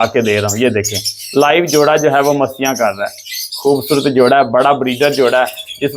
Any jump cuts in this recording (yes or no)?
no